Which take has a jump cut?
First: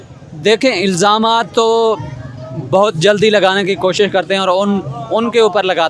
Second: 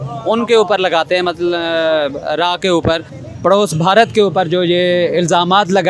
second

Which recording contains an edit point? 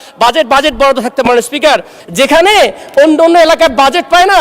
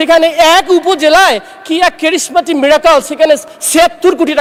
first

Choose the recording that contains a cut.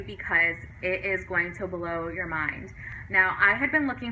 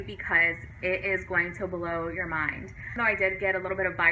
second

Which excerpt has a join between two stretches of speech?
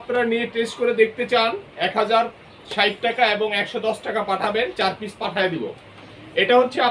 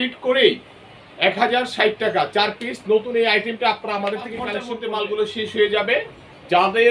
second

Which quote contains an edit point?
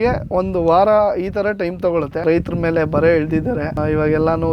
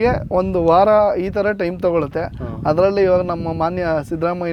first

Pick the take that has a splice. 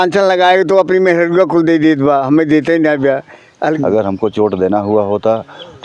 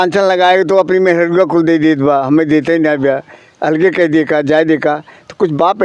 first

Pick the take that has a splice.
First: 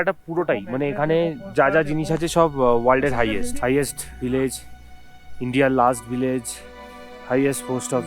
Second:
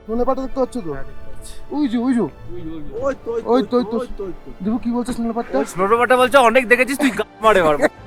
first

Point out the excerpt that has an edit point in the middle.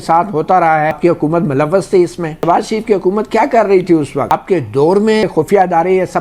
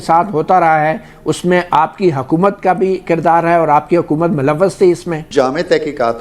first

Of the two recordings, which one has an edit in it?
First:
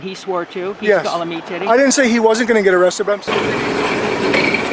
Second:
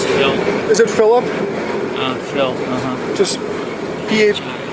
first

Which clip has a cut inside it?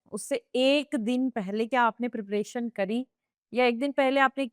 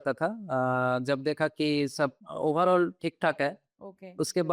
second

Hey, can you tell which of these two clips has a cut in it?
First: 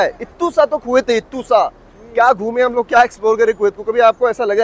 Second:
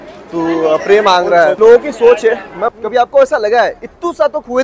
second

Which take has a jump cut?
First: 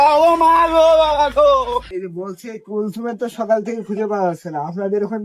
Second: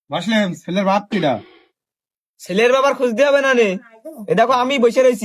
first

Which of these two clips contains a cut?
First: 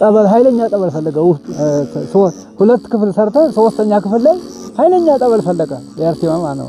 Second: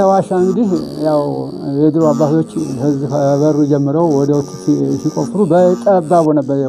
first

